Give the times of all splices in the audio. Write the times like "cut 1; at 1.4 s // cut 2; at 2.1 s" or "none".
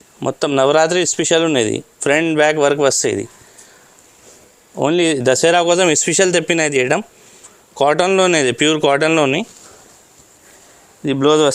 none